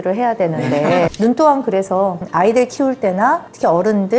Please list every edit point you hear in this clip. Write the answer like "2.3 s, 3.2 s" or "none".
1.1 s